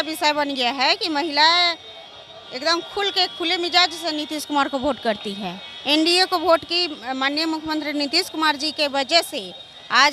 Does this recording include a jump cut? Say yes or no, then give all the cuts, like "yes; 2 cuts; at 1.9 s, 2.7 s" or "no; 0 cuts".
no; 0 cuts